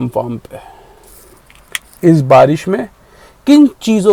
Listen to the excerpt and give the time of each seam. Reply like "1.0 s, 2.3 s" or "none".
none